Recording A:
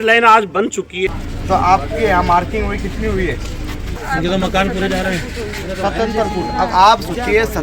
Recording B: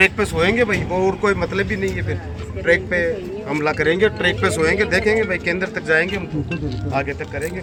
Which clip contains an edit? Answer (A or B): A